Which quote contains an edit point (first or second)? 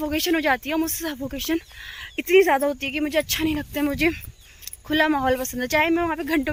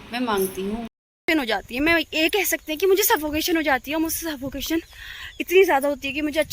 second